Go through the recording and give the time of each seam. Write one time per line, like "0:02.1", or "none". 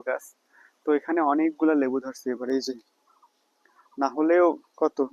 none